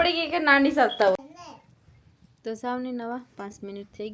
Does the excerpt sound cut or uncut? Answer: cut